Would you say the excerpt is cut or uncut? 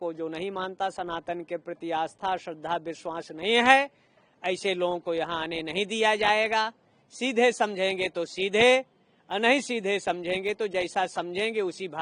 uncut